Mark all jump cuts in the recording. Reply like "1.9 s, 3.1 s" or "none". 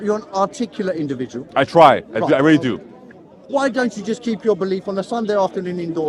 none